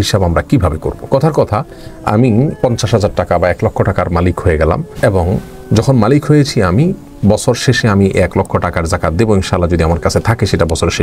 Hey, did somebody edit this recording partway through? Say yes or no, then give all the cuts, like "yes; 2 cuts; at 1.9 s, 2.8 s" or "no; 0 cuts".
yes; 3 cuts; at 0.9 s, 2.5 s, 4.9 s